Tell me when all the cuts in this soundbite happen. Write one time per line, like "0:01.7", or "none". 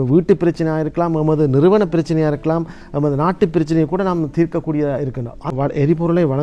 0:05.5